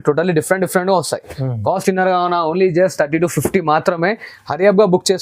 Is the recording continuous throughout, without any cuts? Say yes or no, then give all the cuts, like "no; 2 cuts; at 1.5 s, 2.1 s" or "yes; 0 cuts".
yes; 0 cuts